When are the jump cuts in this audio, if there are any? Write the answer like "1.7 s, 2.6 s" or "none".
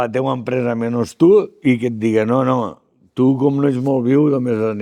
none